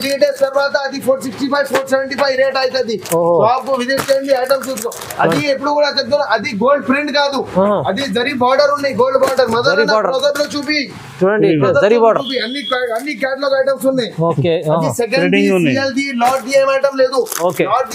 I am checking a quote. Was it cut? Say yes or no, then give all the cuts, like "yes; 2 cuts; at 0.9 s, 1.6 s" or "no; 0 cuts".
no; 0 cuts